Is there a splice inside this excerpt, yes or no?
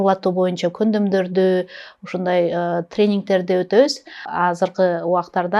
yes